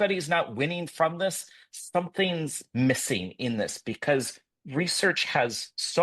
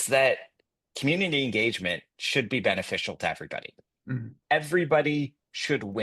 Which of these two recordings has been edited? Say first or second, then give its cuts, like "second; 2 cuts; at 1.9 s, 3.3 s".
second; 1 cut; at 4.3 s